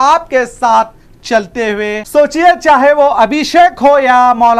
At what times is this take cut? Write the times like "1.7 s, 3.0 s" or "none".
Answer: 2.0 s